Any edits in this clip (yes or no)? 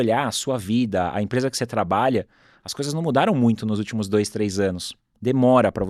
no